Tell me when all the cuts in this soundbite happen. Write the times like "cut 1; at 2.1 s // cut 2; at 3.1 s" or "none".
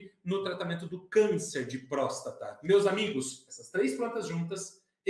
none